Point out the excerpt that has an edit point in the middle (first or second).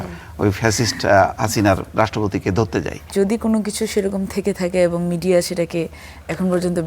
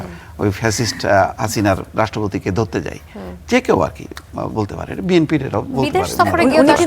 first